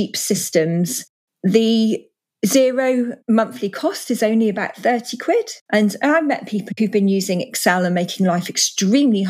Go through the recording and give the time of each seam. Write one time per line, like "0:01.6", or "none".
0:05.6
0:06.7